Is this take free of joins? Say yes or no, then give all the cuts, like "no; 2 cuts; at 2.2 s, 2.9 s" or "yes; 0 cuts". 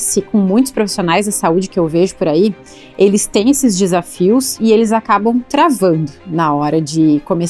yes; 0 cuts